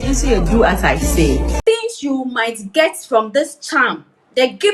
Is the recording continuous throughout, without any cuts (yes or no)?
no